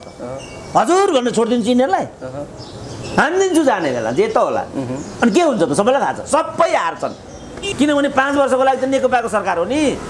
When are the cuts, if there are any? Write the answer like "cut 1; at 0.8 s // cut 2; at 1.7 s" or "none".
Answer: cut 1; at 7.6 s